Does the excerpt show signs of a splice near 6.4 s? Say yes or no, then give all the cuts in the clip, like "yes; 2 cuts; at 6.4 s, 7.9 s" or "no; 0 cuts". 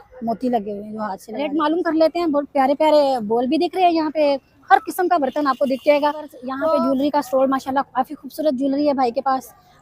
yes; 2 cuts; at 1.3 s, 6.4 s